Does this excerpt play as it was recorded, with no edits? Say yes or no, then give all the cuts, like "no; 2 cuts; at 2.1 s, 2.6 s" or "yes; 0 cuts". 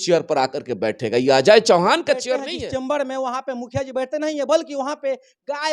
no; 1 cut; at 2.3 s